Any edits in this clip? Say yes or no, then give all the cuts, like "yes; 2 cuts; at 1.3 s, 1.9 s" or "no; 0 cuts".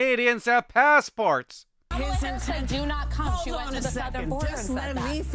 yes; 1 cut; at 1.9 s